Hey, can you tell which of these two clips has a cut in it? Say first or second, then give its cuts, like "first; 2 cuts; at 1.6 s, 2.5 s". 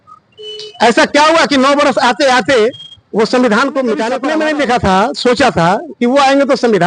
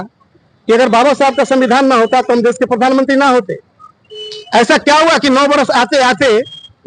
first; 1 cut; at 4.2 s